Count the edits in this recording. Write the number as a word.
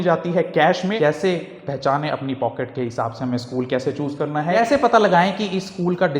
two